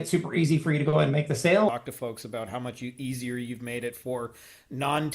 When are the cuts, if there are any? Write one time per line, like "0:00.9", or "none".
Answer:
0:01.7